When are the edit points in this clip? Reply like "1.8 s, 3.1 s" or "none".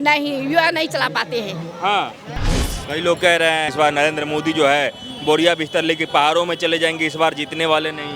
2.6 s, 3.7 s